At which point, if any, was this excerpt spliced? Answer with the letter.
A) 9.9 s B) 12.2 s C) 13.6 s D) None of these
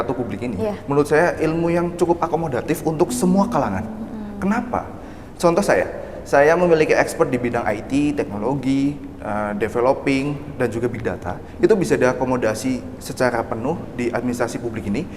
D